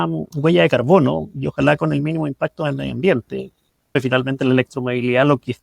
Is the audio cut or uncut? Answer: cut